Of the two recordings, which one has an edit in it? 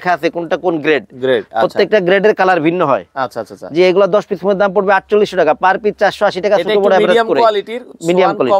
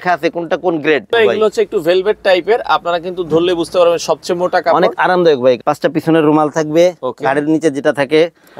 second; 2 cuts; at 1.1 s, 5.6 s

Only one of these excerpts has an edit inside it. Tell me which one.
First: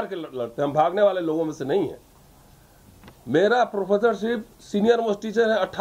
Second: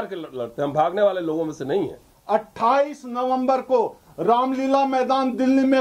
second; 1 cut; at 2.1 s

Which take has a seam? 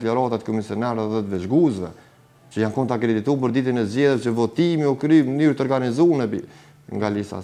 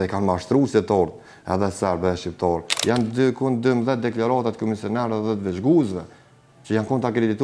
second; 1 cut; at 2.7 s

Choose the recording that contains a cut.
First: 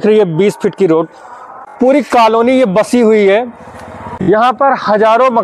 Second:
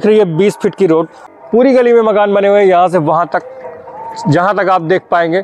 first; 2 cuts; at 1.5 s, 4.1 s

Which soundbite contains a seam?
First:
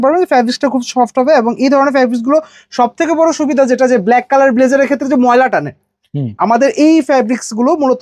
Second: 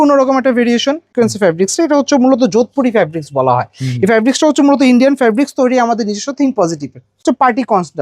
second; 2 cuts; at 1.1 s, 7.2 s

